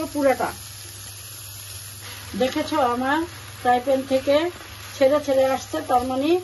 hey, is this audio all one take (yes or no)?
no